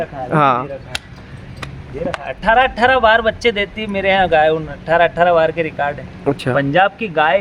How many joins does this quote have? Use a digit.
1